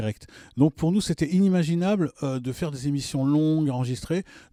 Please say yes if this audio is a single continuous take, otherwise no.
yes